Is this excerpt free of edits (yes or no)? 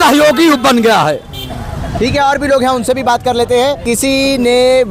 yes